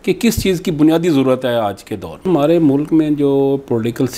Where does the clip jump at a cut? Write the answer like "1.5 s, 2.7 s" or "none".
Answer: 2.3 s